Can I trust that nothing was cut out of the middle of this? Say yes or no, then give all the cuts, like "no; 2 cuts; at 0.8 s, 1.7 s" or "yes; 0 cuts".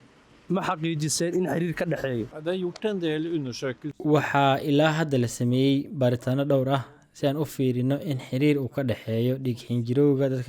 no; 2 cuts; at 2.3 s, 4.0 s